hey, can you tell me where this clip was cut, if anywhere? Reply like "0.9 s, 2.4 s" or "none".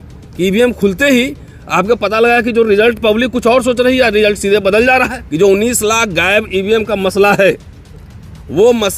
5.2 s